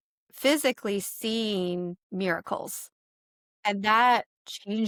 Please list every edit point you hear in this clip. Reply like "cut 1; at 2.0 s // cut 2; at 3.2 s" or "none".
none